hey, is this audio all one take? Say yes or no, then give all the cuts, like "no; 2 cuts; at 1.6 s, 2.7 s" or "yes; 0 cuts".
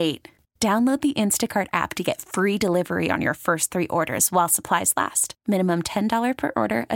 yes; 0 cuts